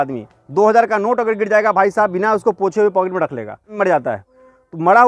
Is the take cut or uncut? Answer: cut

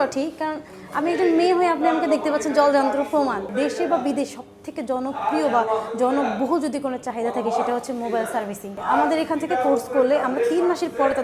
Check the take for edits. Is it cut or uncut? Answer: cut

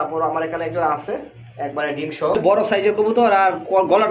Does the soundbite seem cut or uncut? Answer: cut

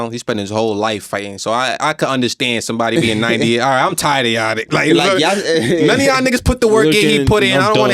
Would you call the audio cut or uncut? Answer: uncut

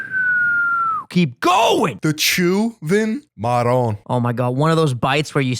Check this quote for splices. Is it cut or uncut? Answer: cut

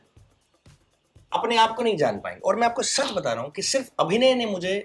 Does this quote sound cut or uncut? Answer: uncut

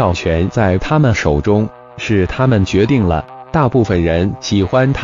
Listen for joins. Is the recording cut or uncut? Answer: uncut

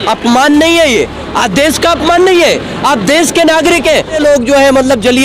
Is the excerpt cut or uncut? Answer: cut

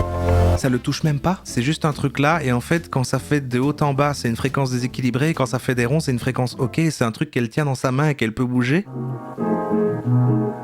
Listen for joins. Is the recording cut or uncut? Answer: cut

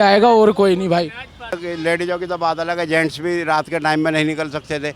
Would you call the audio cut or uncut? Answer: cut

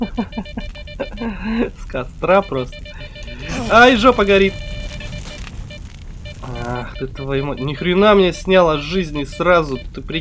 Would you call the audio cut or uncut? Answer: uncut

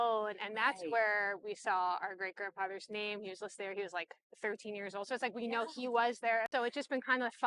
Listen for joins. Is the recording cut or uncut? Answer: uncut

